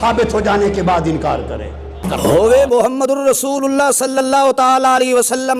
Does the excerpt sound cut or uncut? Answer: cut